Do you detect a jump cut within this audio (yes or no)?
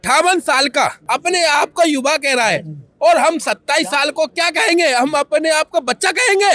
yes